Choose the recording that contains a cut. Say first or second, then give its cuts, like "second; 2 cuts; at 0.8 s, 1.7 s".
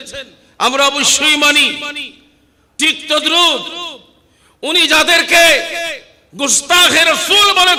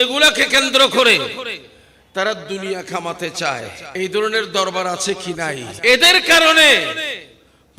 second; 2 cuts; at 3.8 s, 5.7 s